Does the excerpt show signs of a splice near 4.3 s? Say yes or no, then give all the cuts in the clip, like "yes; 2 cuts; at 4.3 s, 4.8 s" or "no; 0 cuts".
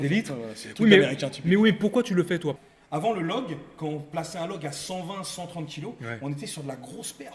no; 1 cut; at 2.7 s